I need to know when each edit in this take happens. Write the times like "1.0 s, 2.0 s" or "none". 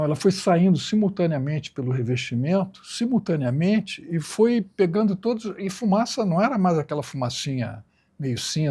none